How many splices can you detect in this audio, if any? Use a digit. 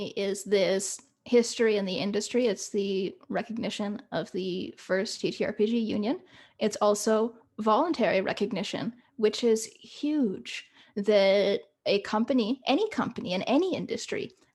0